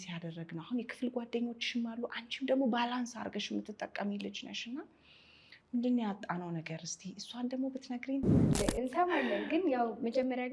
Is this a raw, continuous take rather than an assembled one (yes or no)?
no